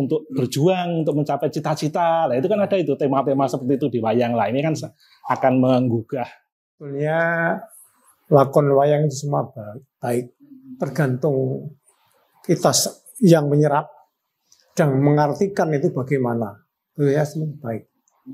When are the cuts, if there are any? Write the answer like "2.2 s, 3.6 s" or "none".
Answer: 6.9 s